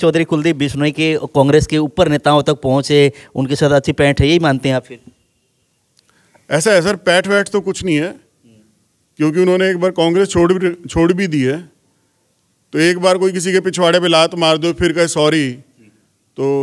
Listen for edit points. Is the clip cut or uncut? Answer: uncut